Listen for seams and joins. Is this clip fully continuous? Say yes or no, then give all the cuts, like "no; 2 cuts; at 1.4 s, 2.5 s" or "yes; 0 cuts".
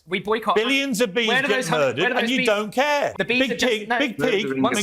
no; 1 cut; at 3.1 s